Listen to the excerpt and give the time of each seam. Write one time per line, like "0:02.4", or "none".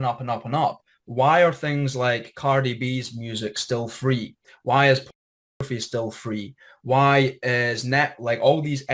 none